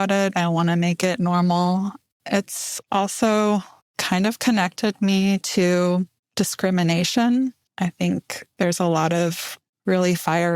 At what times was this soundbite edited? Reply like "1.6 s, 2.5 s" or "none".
none